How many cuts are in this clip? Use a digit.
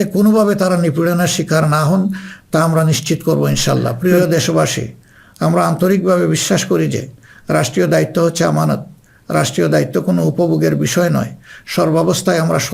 1